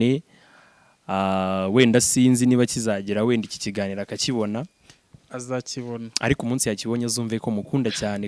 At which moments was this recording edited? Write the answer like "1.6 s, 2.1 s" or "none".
none